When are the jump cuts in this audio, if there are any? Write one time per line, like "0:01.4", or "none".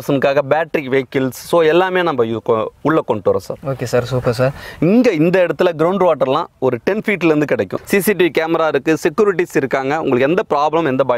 0:04.7
0:07.7